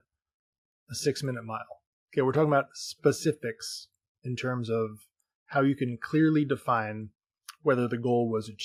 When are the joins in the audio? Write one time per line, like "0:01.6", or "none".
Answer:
none